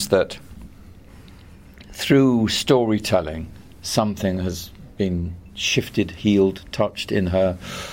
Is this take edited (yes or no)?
no